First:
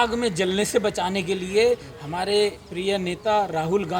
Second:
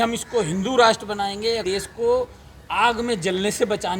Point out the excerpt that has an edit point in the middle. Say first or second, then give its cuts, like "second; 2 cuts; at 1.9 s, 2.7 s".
second; 1 cut; at 1.6 s